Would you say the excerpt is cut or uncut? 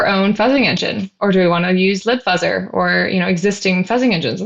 uncut